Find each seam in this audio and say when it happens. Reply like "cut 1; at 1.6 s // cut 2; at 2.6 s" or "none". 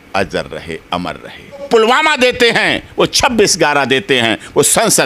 cut 1; at 1.6 s